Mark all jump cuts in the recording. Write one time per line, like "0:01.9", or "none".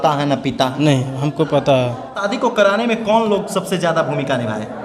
0:02.3